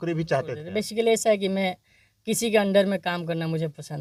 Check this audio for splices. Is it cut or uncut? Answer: uncut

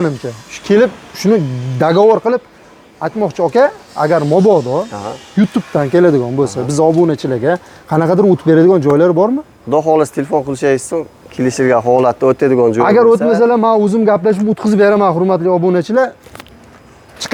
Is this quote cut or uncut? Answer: uncut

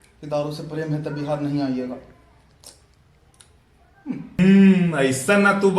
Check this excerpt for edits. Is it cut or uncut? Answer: cut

